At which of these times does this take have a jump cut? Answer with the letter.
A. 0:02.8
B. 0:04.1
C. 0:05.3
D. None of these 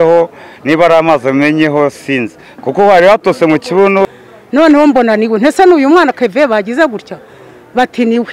B